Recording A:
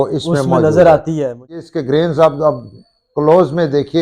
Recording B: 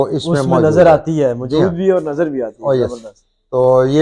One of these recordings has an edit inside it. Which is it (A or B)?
A